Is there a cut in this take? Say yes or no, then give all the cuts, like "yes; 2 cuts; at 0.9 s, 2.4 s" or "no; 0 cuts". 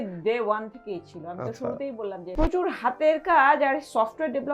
yes; 1 cut; at 2.3 s